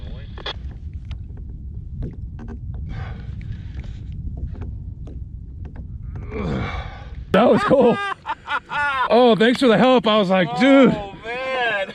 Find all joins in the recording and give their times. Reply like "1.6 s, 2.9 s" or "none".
7.3 s